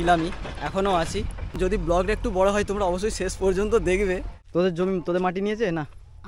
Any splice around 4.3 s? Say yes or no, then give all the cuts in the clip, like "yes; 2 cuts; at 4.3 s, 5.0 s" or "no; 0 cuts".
yes; 2 cuts; at 1.6 s, 4.3 s